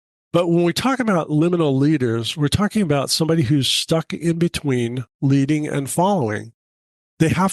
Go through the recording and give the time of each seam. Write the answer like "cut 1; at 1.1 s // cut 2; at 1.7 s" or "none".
none